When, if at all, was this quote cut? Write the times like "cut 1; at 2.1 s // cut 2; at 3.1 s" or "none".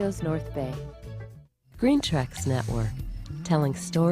cut 1; at 2.1 s